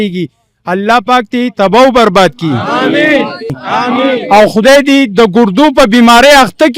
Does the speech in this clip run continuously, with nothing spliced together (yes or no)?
no